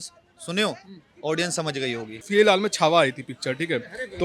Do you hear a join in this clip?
yes; 1 cut; at 2.2 s

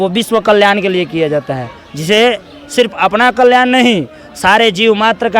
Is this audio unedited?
yes; 0 cuts

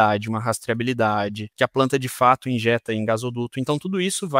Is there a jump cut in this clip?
yes; 1 cut; at 1.5 s

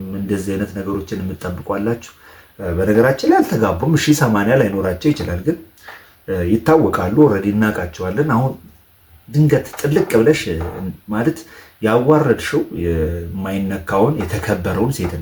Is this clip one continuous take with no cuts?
yes; 0 cuts

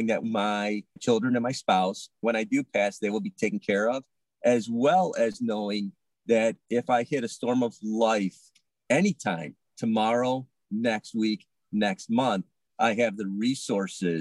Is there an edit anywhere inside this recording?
no; 0 cuts

